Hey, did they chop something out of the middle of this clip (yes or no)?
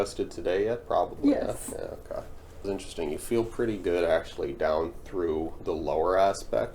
yes